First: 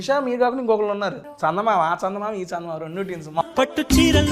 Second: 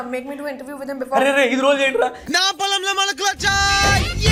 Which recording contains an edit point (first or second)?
first